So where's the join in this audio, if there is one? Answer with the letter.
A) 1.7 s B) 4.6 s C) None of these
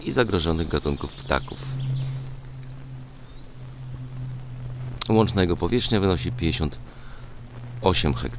B